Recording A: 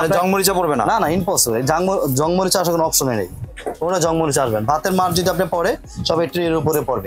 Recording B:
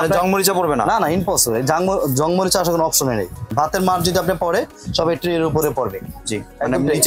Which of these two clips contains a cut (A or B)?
B